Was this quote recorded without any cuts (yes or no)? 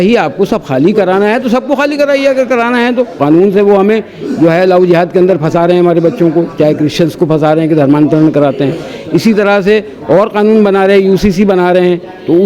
no